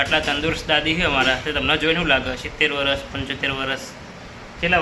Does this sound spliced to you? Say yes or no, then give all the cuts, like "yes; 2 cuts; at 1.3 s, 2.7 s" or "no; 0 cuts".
no; 0 cuts